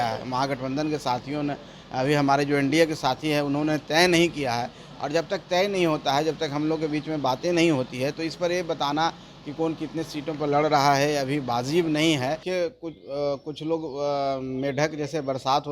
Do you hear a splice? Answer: yes; 1 cut; at 12.4 s

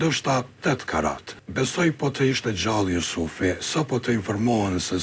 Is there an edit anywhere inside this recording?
yes; 1 cut; at 1.4 s

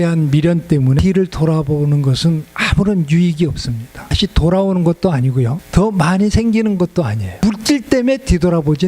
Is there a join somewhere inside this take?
yes; 4 cuts; at 1.0 s, 4.1 s, 5.6 s, 7.4 s

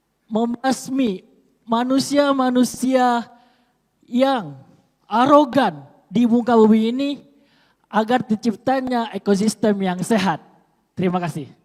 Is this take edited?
no; 0 cuts

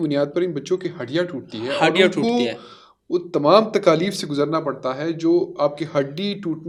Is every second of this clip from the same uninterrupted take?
yes; 0 cuts

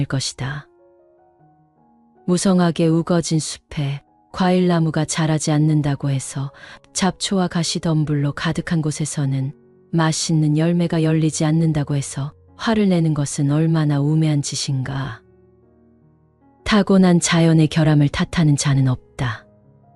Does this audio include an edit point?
no; 0 cuts

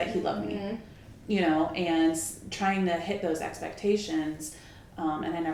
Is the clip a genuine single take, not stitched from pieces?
yes; 0 cuts

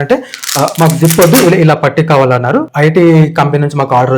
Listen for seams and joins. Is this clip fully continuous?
no; 1 cut; at 2.7 s

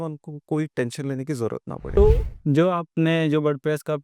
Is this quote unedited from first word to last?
no; 1 cut; at 1.9 s

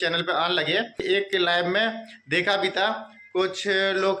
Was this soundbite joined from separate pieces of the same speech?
yes; 1 cut; at 1.0 s

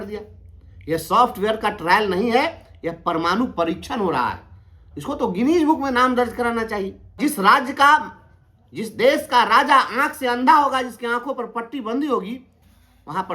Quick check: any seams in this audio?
yes; 1 cut; at 7.2 s

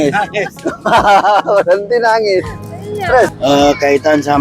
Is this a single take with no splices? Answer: no; 1 cut; at 3.3 s

